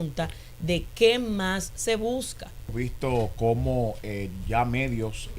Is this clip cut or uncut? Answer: cut